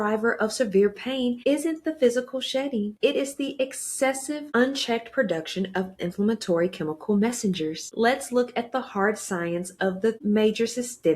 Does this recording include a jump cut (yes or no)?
yes